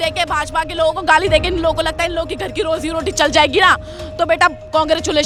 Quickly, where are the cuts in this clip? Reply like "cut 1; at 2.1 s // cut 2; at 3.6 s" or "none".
none